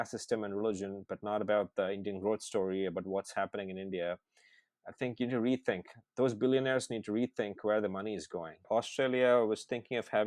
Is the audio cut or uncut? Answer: cut